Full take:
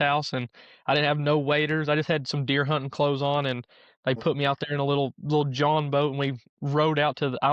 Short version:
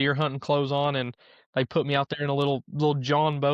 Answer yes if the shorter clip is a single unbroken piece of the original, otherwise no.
yes